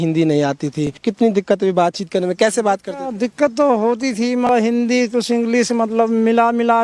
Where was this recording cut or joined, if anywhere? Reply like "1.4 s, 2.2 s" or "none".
1.0 s, 4.5 s